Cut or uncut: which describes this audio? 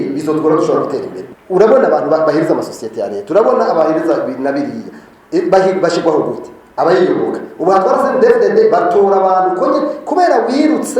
cut